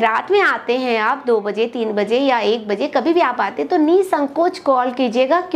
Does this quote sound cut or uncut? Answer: uncut